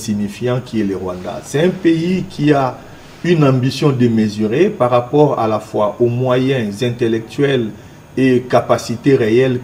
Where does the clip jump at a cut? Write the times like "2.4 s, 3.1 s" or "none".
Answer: none